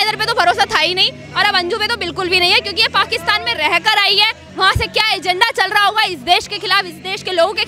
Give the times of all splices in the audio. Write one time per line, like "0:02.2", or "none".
none

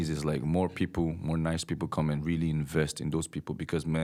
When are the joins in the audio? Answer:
none

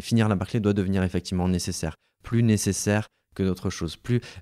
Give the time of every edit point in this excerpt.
none

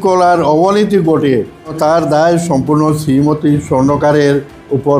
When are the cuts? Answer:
0:01.7

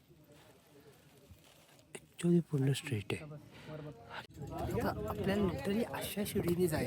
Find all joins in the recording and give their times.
0:04.2

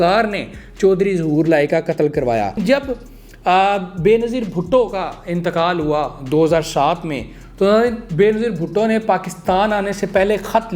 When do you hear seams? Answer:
0:02.6

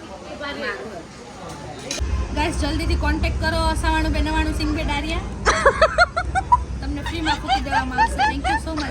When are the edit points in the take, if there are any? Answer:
0:02.0

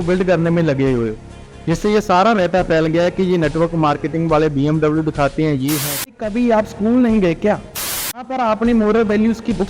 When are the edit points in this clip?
0:06.2
0:08.1

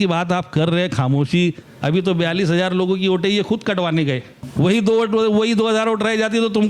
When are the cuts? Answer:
0:01.7
0:04.4

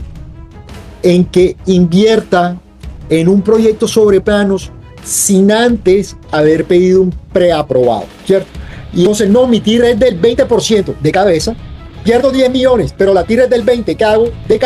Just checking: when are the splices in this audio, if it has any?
0:09.1

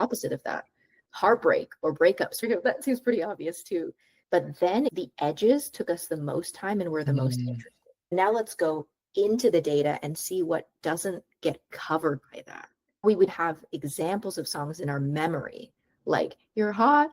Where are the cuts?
0:02.4
0:08.1

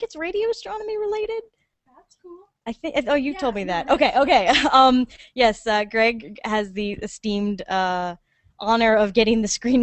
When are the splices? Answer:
0:05.4

